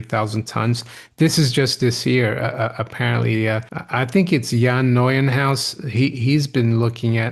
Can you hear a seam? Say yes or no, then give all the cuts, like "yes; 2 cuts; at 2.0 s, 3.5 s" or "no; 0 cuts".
yes; 1 cut; at 3.7 s